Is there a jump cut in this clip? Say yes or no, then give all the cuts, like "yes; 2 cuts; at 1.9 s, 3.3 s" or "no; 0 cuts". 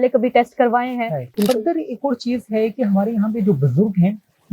yes; 1 cut; at 1.2 s